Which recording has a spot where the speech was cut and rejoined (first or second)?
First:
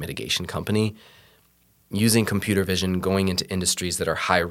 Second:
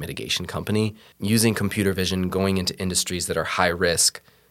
second